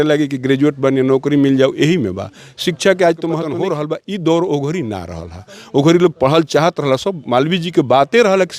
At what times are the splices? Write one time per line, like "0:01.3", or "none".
0:03.5